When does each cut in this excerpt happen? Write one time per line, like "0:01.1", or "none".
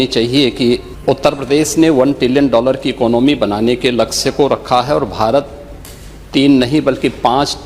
0:00.9